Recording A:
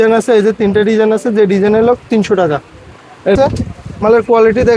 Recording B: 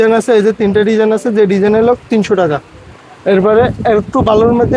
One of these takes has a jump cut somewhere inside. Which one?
A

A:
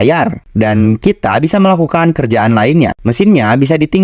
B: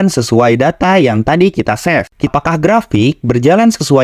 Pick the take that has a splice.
B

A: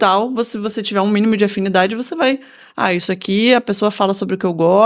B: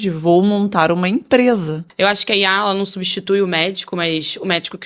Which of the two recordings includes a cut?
B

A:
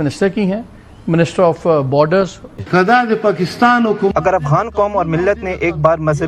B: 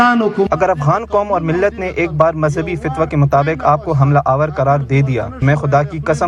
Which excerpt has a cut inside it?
A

